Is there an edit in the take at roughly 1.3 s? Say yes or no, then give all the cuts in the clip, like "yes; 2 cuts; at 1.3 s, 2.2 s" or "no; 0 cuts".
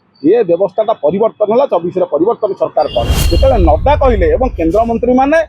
no; 1 cut; at 3.2 s